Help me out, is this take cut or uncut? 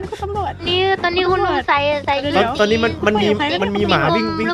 uncut